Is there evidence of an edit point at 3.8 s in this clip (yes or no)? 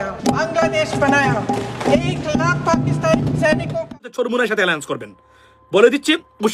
yes